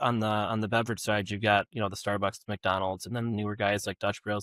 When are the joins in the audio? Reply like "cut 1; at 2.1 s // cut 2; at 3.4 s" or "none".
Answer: none

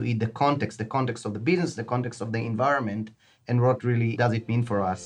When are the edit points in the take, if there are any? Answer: cut 1; at 4.1 s

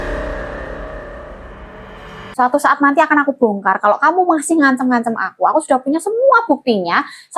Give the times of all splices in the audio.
cut 1; at 2.1 s

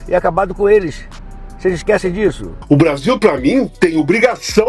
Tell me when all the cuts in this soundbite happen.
cut 1; at 2.6 s

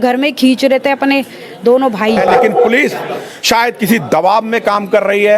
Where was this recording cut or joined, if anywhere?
cut 1; at 2.2 s

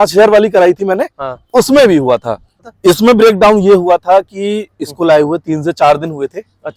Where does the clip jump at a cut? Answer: cut 1; at 2.6 s

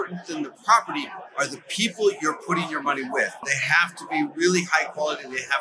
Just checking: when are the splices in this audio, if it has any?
cut 1; at 3.5 s

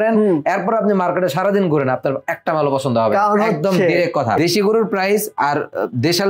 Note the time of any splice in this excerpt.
cut 1; at 4.4 s

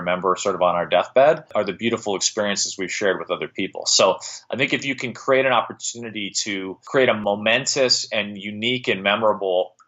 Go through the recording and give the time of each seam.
cut 1; at 1.5 s // cut 2; at 7.2 s

